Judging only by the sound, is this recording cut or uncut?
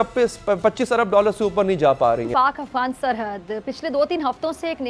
cut